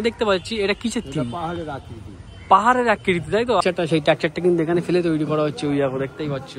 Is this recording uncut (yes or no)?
no